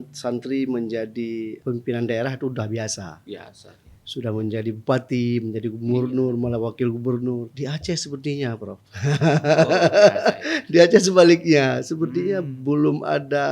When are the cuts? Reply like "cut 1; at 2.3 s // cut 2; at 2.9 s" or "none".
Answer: cut 1; at 1.6 s // cut 2; at 7.5 s